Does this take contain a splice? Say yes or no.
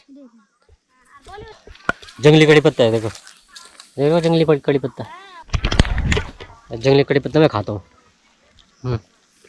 yes